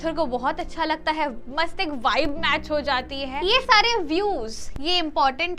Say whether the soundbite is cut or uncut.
cut